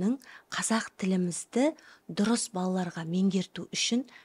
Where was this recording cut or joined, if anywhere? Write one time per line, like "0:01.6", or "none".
none